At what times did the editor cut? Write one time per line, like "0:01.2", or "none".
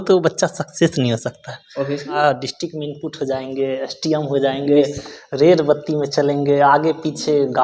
0:02.2